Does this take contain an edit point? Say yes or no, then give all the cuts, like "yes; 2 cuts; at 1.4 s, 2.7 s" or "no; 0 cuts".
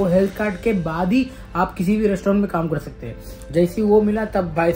no; 0 cuts